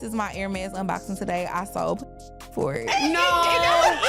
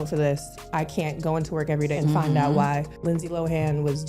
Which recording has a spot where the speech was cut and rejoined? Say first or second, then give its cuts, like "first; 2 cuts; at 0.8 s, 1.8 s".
second; 2 cuts; at 2.0 s, 2.9 s